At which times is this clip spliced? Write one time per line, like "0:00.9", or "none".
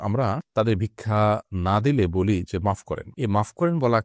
0:01.5